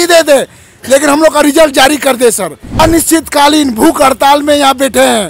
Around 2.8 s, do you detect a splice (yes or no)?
yes